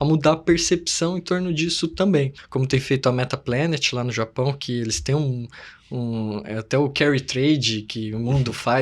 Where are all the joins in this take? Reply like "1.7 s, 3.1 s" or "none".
2.4 s